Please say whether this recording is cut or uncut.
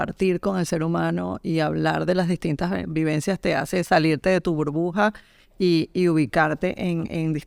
uncut